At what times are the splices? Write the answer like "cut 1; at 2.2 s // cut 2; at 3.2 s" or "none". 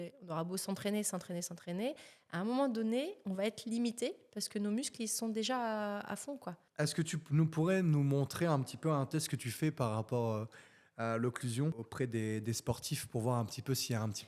cut 1; at 6.6 s // cut 2; at 11.8 s